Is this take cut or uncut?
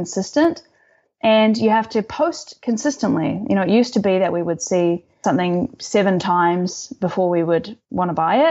cut